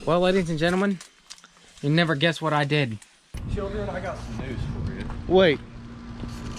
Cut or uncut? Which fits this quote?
cut